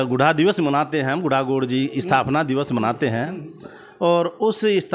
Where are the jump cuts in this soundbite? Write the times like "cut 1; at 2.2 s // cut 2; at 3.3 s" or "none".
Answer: none

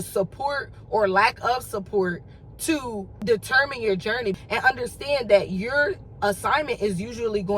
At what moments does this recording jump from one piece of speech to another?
cut 1; at 3.2 s // cut 2; at 4.4 s

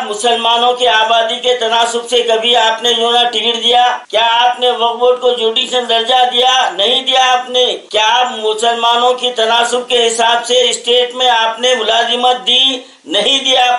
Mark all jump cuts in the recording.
cut 1; at 4.0 s

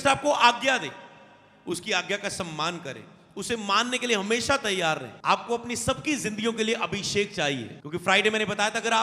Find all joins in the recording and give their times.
cut 1; at 5.1 s // cut 2; at 7.7 s

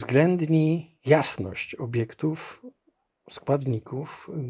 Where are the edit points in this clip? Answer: cut 1; at 0.9 s

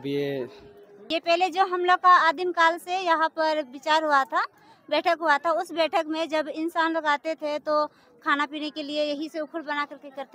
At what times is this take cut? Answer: cut 1; at 0.9 s

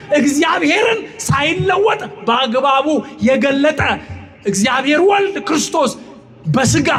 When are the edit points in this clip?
none

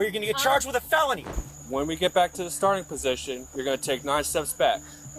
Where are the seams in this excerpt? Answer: cut 1; at 1.3 s

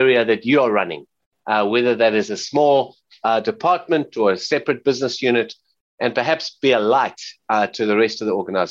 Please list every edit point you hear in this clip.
none

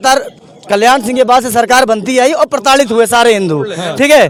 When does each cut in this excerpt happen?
none

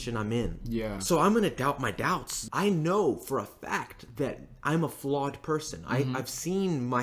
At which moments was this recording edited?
cut 1; at 1.0 s // cut 2; at 2.3 s

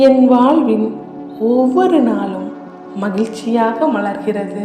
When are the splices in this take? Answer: none

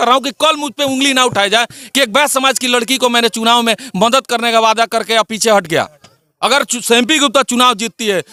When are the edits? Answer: none

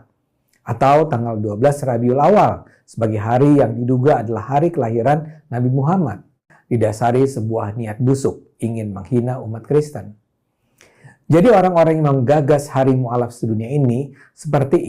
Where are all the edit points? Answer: cut 1; at 6.5 s

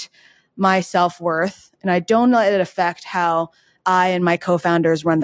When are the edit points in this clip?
none

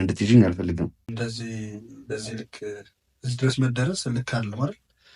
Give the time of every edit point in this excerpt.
cut 1; at 1.0 s

